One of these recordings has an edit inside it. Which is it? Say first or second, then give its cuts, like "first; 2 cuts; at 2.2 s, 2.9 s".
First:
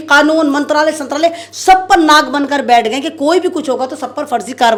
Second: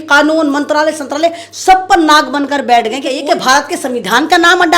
second; 1 cut; at 3.2 s